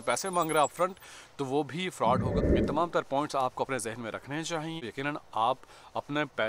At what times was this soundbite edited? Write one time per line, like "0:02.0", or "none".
0:02.4
0:04.8